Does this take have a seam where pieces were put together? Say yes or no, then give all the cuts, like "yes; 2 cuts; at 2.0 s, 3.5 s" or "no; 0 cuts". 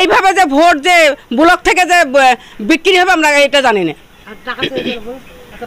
no; 0 cuts